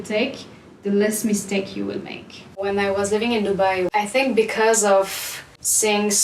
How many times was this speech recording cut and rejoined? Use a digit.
2